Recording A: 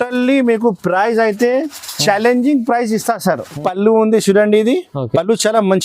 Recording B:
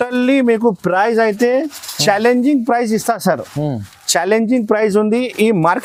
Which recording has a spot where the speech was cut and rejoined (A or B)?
A